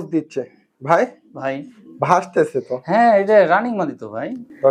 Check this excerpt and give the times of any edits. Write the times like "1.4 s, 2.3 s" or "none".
none